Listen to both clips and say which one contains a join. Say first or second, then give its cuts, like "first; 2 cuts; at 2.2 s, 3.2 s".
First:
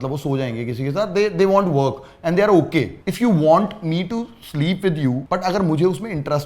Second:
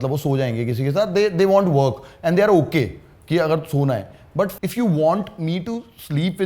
first; 2 cuts; at 3.1 s, 5.2 s